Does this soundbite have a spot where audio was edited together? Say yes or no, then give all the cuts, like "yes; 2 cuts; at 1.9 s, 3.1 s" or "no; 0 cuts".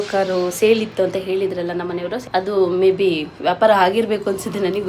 yes; 1 cut; at 2.2 s